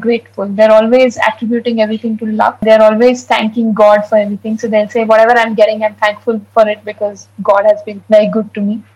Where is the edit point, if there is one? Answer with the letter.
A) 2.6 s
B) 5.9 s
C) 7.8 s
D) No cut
A